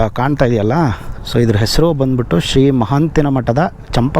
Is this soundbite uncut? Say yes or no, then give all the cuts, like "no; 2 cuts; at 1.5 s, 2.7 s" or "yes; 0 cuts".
yes; 0 cuts